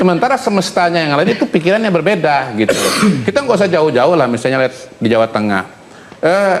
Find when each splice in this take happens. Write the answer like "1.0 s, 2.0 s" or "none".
none